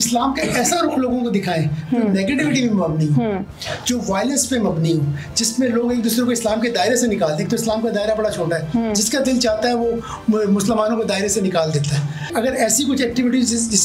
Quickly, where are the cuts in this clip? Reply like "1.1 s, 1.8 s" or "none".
12.3 s